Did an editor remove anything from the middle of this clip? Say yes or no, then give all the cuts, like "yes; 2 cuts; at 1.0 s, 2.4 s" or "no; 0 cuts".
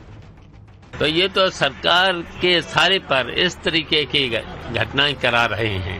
no; 0 cuts